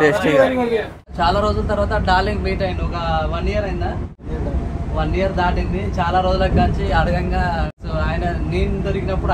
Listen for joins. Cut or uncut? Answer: cut